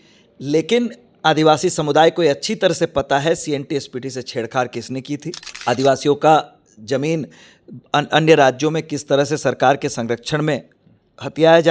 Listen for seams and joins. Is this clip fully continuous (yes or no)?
no